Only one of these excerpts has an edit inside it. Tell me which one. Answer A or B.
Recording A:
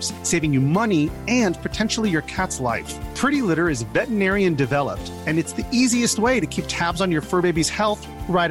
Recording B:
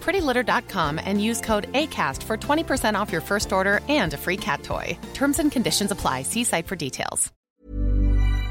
B